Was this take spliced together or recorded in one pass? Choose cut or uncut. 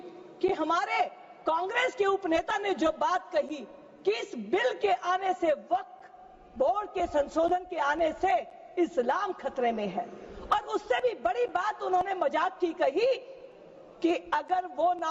uncut